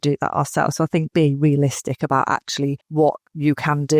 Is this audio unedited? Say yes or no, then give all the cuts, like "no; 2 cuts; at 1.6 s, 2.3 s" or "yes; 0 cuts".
no; 1 cut; at 2.8 s